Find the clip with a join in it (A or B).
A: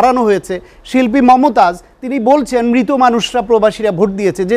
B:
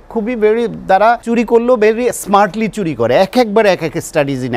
B